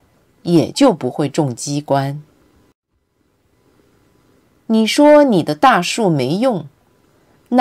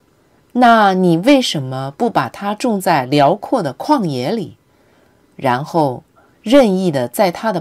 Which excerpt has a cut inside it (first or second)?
second